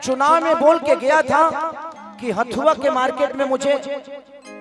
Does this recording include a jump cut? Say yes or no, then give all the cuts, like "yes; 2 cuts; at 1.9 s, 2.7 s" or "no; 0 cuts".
no; 0 cuts